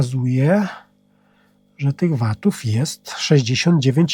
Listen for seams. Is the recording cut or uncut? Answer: uncut